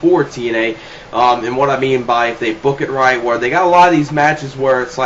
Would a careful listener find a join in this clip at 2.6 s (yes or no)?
no